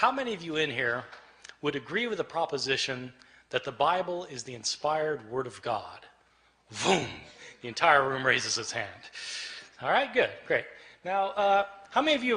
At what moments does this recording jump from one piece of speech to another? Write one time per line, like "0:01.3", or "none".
0:06.5